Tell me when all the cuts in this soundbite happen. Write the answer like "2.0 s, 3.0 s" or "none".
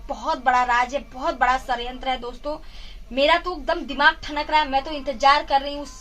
none